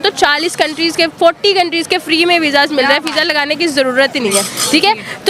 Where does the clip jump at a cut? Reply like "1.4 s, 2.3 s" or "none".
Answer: none